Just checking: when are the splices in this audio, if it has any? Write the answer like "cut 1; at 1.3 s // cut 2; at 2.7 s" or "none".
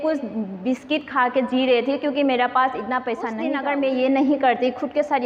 cut 1; at 3.5 s